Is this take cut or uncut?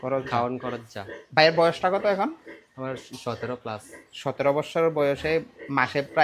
uncut